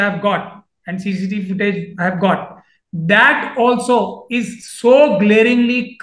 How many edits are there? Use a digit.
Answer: 0